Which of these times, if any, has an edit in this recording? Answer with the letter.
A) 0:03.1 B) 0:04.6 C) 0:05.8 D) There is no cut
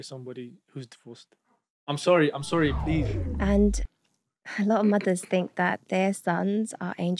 A